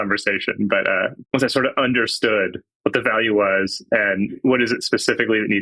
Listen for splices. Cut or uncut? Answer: cut